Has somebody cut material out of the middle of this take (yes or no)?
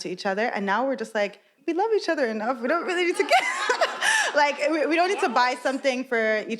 yes